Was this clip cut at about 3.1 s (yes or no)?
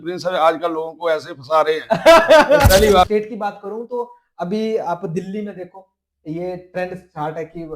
yes